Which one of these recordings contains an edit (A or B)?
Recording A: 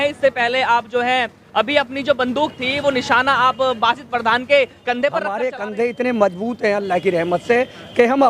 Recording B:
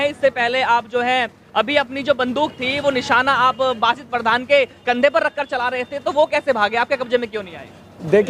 A